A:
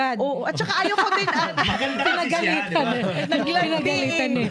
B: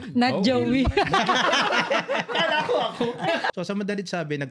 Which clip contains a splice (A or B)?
B